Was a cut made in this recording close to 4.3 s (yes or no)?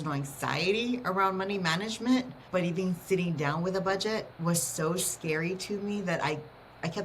yes